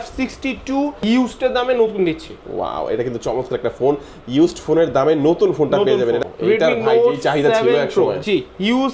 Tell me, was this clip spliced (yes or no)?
yes